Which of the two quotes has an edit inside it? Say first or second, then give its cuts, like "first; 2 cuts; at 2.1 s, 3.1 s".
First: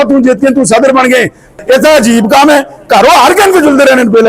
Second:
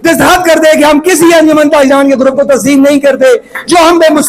first; 1 cut; at 1.5 s